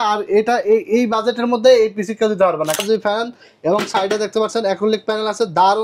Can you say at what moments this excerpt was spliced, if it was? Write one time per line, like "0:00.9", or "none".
0:02.8